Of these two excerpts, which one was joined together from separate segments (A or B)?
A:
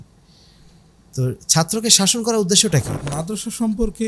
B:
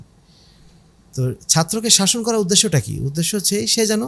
A